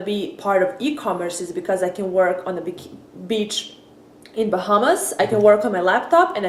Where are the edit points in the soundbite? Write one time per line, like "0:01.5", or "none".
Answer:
none